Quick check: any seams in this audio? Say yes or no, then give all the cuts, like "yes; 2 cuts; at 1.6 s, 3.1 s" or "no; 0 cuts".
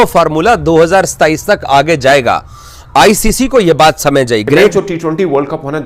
yes; 1 cut; at 4.7 s